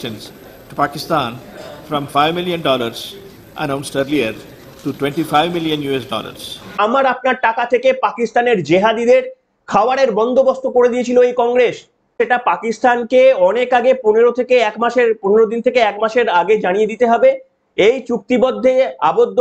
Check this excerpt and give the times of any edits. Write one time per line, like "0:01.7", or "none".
0:06.7
0:12.1